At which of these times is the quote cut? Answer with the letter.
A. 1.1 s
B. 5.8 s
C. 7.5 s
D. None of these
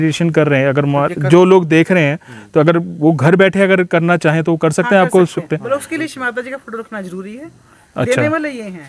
D